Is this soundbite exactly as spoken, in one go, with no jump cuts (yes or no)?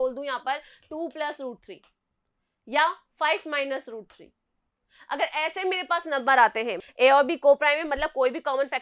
no